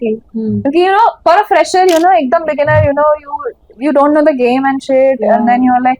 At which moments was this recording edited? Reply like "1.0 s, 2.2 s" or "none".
1.2 s